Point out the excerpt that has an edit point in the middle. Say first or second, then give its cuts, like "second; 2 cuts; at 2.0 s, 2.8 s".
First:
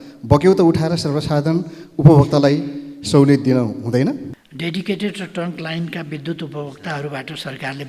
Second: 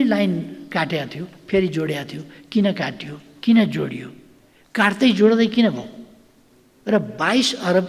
first; 1 cut; at 4.4 s